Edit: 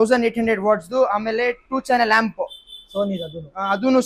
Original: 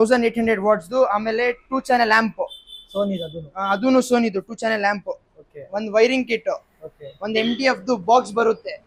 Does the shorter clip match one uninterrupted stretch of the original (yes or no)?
yes